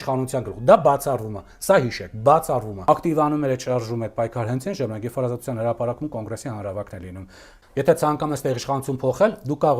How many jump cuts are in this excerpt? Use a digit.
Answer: 2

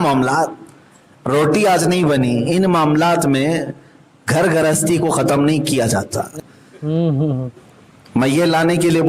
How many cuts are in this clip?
1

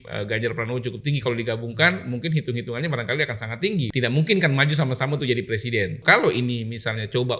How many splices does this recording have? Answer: 2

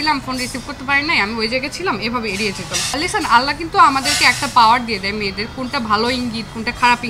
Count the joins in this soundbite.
1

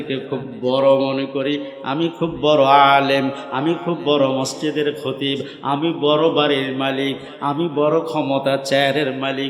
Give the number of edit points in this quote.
0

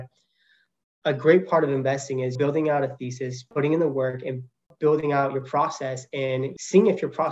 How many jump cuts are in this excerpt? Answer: 4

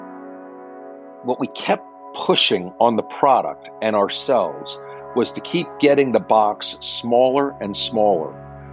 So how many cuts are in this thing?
0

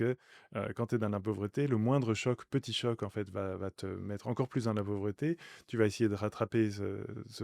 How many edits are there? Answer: 0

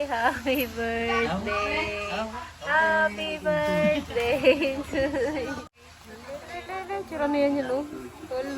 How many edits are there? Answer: 1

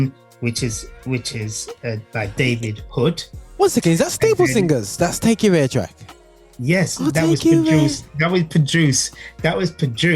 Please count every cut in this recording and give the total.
0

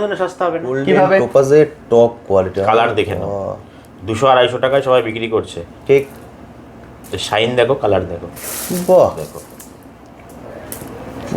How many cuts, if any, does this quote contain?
1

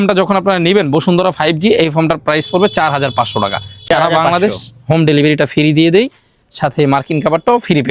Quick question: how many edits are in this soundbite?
0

